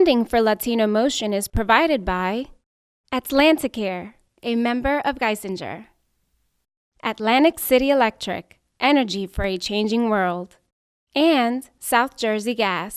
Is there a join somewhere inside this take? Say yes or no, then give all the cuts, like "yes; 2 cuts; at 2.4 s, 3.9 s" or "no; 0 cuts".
no; 0 cuts